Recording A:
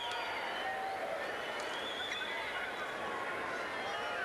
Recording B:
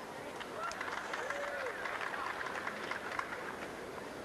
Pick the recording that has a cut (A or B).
A